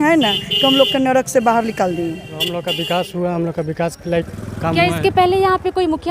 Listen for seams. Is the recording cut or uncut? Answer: cut